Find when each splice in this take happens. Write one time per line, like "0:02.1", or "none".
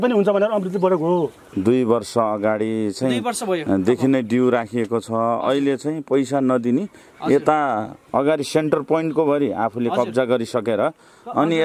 0:01.5